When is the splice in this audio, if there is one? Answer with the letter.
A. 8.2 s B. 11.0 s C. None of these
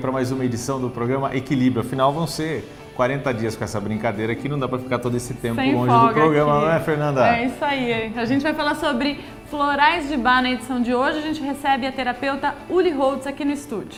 C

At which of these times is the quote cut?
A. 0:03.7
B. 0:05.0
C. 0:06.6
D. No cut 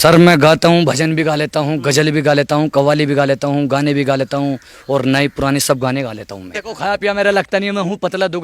C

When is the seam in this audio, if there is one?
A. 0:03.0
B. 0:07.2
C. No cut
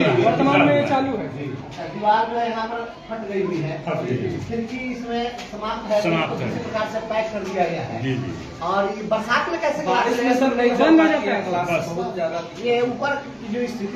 C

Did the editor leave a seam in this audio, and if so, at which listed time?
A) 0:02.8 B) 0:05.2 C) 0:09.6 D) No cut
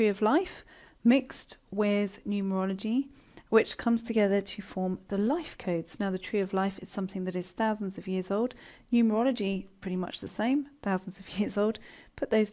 B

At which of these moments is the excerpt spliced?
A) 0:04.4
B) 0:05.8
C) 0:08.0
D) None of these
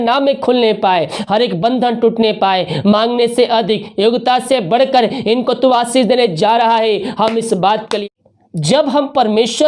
C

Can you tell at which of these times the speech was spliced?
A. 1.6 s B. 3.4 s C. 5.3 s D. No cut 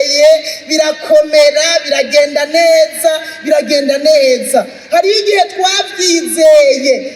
D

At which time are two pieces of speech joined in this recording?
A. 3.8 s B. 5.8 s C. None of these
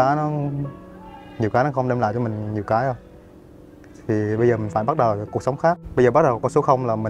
B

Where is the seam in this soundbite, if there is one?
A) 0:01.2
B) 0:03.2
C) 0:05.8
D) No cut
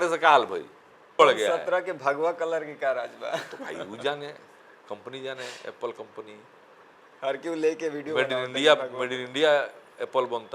A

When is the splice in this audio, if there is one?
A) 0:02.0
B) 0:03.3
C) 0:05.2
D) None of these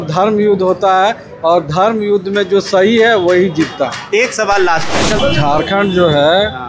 C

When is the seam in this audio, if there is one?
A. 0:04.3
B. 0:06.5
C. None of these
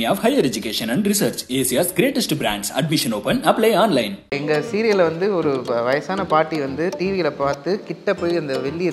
A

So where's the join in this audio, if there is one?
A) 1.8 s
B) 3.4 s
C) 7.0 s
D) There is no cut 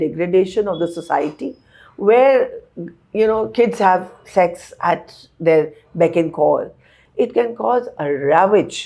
C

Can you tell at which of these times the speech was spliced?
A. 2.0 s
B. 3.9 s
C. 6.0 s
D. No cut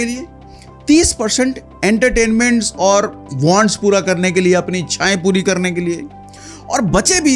D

